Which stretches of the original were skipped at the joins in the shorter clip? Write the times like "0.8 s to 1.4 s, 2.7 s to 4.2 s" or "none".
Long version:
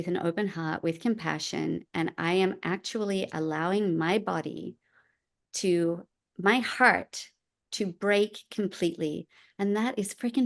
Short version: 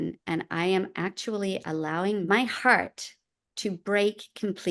3.9 s to 6.4 s